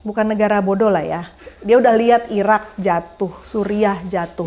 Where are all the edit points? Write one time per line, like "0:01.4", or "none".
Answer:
none